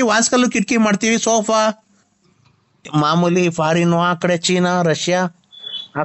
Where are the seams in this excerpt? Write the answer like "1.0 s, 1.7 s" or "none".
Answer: 2.8 s